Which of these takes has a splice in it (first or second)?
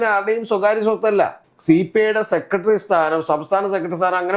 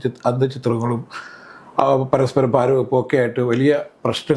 first